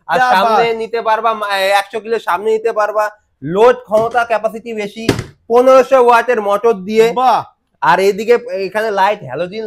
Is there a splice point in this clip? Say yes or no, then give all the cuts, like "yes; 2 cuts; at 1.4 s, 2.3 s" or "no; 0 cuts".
no; 0 cuts